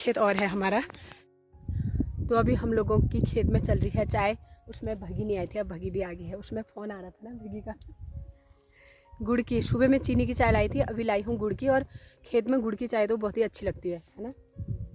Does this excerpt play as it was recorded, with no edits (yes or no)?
yes